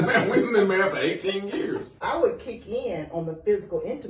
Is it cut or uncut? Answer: cut